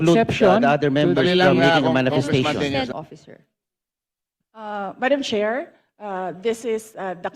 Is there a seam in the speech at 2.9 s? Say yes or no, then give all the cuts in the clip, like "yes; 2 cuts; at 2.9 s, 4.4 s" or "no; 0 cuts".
yes; 1 cut; at 2.9 s